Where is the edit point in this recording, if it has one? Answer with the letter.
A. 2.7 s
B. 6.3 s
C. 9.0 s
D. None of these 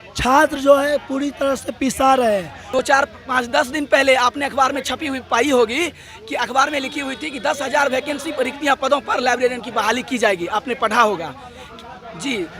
A